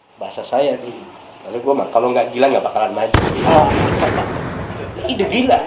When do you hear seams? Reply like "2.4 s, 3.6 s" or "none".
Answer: none

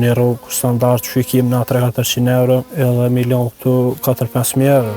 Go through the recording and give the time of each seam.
2.7 s

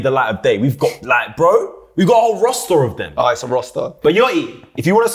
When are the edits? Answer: 3.9 s

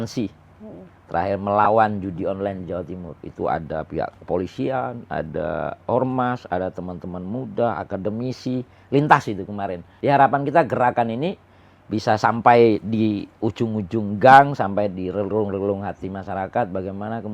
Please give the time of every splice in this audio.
9.8 s

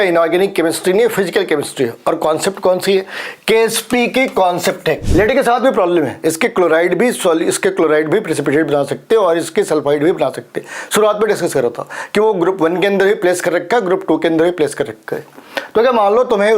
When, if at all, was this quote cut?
5.0 s

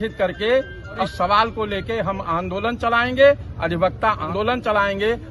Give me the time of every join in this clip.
1.0 s, 4.3 s

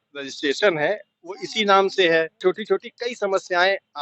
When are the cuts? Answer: 2.4 s

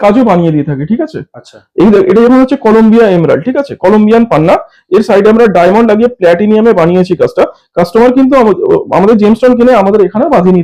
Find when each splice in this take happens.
none

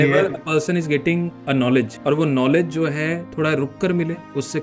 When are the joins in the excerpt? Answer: 1.4 s

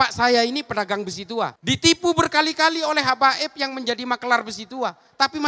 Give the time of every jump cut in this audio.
none

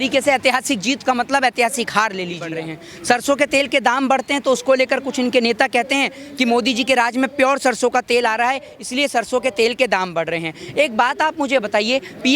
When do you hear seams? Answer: 2.5 s

